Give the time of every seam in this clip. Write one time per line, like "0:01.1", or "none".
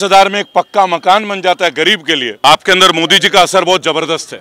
0:02.3